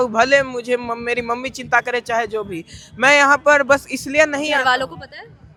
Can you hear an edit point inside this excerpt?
no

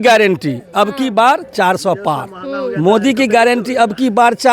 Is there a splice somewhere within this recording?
no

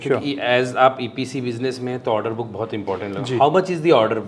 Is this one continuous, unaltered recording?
yes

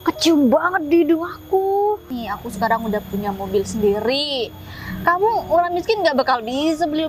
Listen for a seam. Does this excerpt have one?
yes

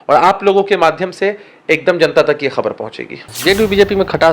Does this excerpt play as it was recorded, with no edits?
no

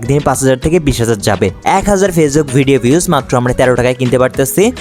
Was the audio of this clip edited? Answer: yes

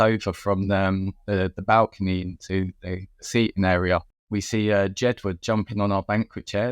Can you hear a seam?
yes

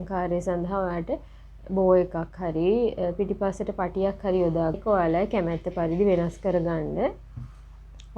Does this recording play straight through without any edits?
no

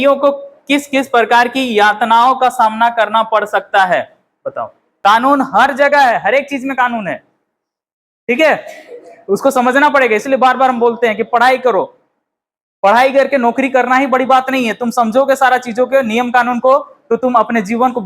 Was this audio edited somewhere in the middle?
yes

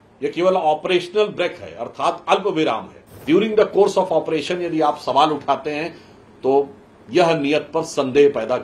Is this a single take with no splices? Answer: no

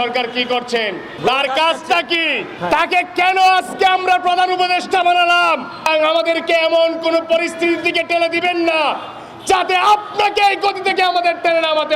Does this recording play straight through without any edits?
no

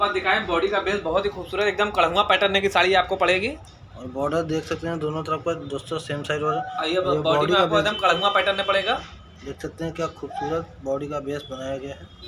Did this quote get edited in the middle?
no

